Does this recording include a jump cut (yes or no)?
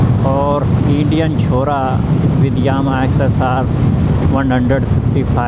no